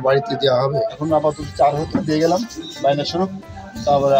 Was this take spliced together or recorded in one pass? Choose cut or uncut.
cut